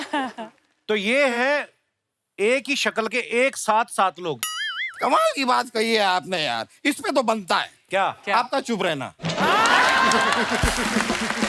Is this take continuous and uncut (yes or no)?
yes